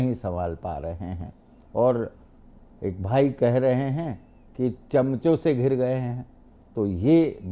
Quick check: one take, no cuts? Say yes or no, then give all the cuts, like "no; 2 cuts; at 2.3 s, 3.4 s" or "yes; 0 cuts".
yes; 0 cuts